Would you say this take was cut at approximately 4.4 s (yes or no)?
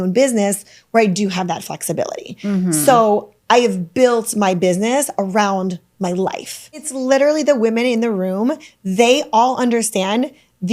no